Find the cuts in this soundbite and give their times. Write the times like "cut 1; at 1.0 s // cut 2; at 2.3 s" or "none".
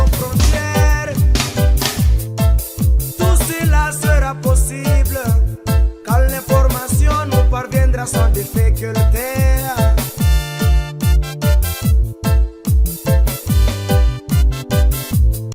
none